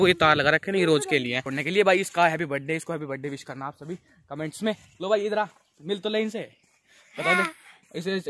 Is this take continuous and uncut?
no; 1 cut; at 1.5 s

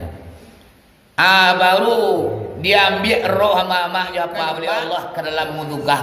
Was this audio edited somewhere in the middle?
yes; 1 cut; at 4.5 s

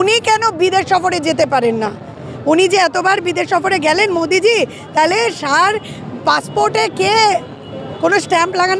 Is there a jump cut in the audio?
no; 0 cuts

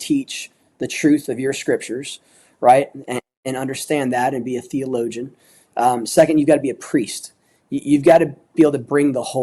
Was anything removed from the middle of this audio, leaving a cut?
no; 0 cuts

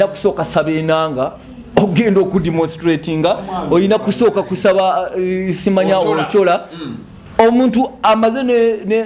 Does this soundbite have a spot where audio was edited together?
no; 0 cuts

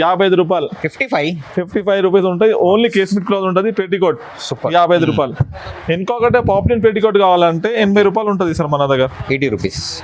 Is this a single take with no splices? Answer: yes; 0 cuts

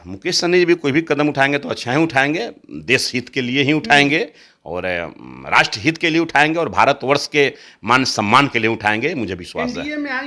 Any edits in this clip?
no; 0 cuts

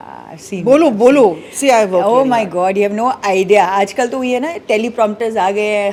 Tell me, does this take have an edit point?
no; 0 cuts

